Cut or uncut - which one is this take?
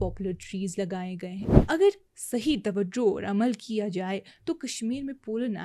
cut